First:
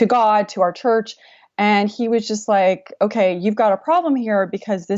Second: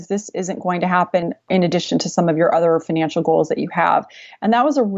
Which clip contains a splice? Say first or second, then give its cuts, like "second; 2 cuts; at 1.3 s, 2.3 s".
second; 1 cut; at 1.5 s